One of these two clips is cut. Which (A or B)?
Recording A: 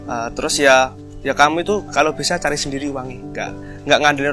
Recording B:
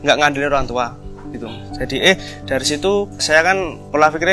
B